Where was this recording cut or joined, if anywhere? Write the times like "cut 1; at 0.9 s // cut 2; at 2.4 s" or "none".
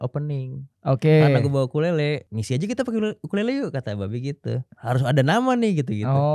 cut 1; at 2.3 s // cut 2; at 4.7 s